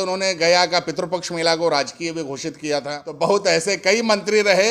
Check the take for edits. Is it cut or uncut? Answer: cut